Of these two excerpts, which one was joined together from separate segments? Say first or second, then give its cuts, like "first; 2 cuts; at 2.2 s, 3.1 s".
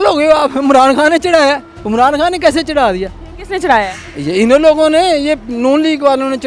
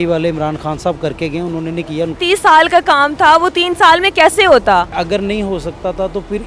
second; 2 cuts; at 2.2 s, 4.9 s